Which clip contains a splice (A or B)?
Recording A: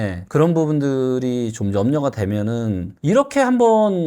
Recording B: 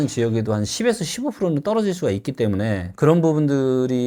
A